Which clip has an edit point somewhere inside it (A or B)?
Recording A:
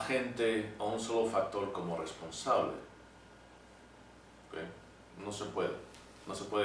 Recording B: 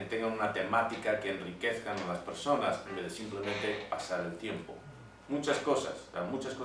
B